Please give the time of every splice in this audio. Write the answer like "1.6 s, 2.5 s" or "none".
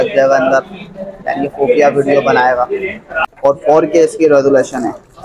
3.2 s